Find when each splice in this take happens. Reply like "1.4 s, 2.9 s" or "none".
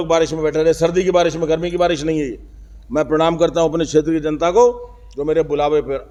none